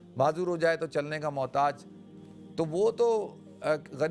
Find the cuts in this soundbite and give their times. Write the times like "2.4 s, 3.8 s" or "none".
none